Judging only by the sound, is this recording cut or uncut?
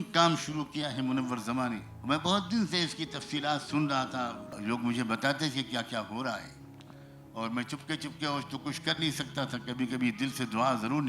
cut